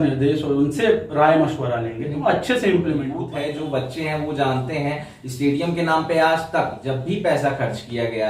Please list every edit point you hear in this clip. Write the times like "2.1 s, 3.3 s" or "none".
3.2 s